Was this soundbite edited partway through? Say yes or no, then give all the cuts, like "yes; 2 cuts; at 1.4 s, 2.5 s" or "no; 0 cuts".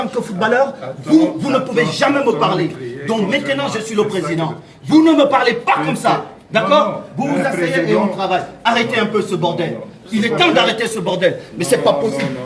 no; 0 cuts